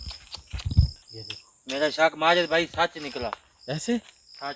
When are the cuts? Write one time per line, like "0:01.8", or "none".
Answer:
0:01.0